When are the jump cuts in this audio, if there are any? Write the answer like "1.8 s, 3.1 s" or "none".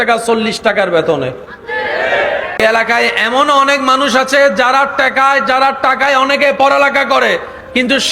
2.6 s

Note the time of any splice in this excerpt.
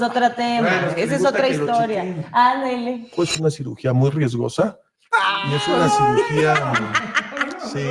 3.1 s

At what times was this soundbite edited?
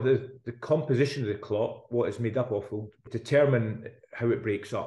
3.0 s

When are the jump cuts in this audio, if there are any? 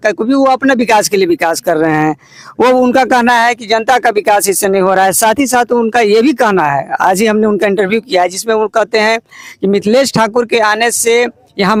none

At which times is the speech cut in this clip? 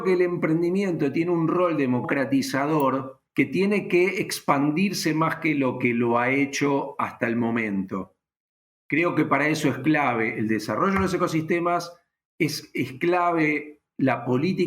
2.0 s, 3.2 s

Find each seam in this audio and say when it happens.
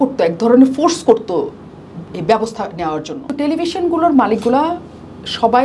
3.3 s

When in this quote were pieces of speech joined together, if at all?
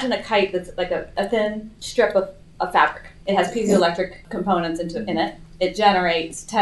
1.4 s, 3.1 s, 4.2 s

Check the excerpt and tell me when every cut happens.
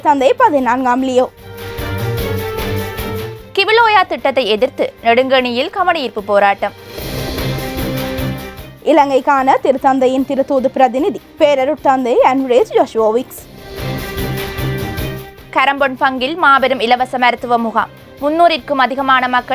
1.7 s, 3.3 s

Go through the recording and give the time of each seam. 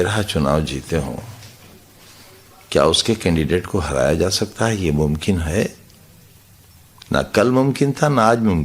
3.5 s

